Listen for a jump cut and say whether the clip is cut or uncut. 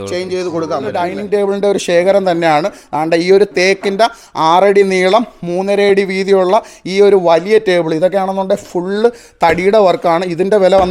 cut